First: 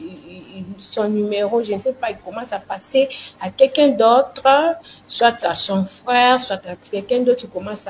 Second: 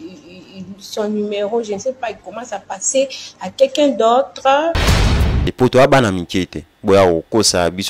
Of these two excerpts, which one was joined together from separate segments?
second; 1 cut; at 5.2 s

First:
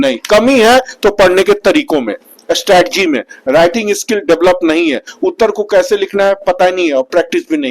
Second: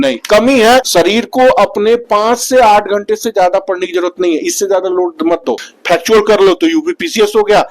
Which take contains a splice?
second; 2 cuts; at 0.9 s, 5.6 s

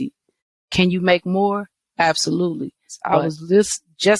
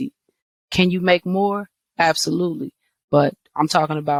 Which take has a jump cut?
first; 1 cut; at 2.9 s

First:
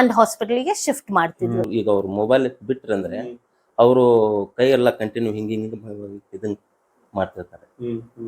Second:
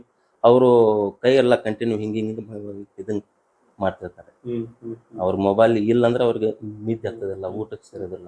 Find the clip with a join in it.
first; 1 cut; at 1.7 s

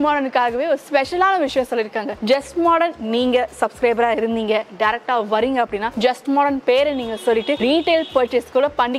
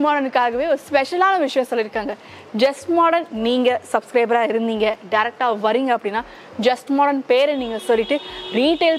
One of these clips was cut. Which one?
first; 3 cuts; at 2.1 s, 5.9 s, 7.6 s

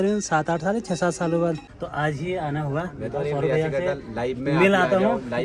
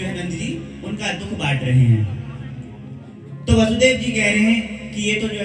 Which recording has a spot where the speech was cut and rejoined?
first; 1 cut; at 1.7 s

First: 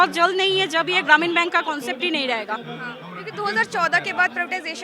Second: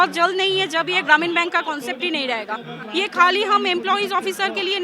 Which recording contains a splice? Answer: second; 1 cut; at 2.8 s

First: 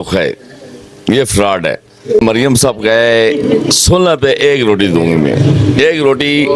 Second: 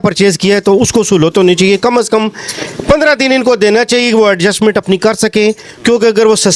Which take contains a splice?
first; 1 cut; at 3.4 s

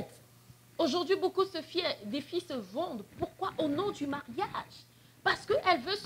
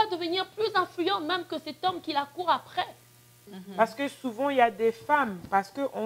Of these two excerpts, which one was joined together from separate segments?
second; 1 cut; at 3.6 s

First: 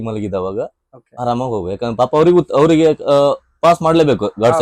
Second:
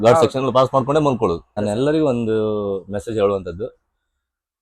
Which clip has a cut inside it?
second; 1 cut; at 1.5 s

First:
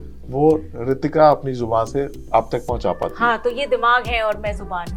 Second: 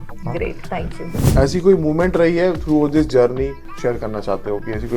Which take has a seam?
second; 2 cuts; at 1.2 s, 3.7 s

